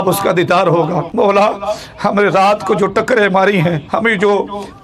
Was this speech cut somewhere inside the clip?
yes; 2 cuts; at 1.1 s, 3.8 s

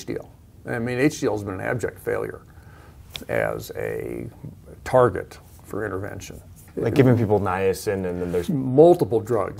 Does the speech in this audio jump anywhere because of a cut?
yes; 2 cuts; at 6.6 s, 8.5 s

